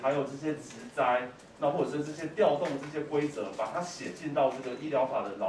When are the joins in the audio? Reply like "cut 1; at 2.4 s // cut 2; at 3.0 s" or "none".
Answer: none